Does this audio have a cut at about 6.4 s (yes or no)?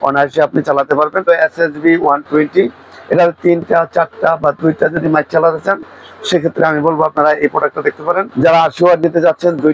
no